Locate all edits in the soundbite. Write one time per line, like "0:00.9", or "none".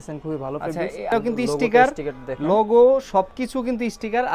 0:01.1